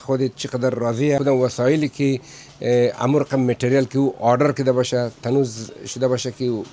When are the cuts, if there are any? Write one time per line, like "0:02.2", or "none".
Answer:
0:01.2